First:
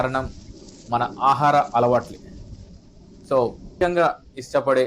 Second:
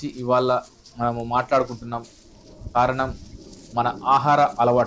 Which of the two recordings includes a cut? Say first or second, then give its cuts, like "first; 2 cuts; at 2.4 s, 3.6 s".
first; 1 cut; at 3.7 s